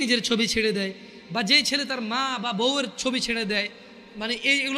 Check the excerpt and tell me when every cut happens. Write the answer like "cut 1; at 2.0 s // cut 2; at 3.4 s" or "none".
none